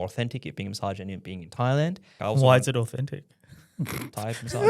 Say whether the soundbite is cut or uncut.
cut